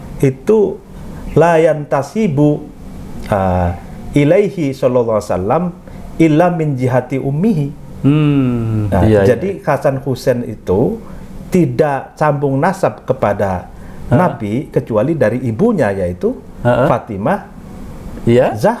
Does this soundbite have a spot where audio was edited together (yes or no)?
no